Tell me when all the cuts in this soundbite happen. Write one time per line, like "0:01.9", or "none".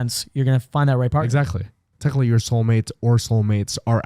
0:01.9